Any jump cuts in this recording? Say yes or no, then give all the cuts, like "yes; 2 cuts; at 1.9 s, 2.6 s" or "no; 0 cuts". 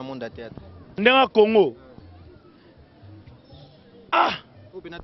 no; 0 cuts